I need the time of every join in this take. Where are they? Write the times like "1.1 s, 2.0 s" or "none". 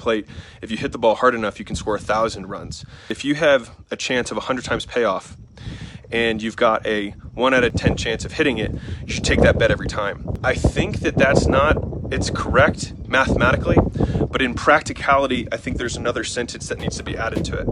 3.1 s, 7.7 s, 10.3 s